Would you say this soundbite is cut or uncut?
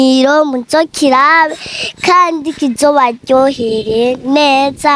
uncut